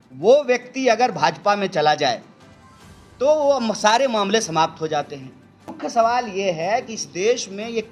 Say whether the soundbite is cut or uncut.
cut